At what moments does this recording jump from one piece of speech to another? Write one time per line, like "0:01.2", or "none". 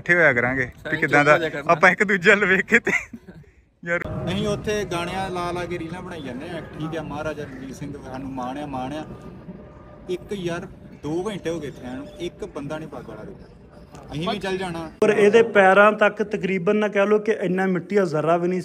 0:04.0
0:15.0